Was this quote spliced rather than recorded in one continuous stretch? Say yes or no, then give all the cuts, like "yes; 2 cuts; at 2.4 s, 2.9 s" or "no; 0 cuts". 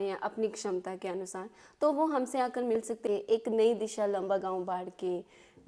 yes; 1 cut; at 3.0 s